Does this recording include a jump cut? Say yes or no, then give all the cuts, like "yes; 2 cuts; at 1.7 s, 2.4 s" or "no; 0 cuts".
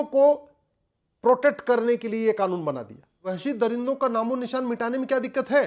yes; 1 cut; at 3.4 s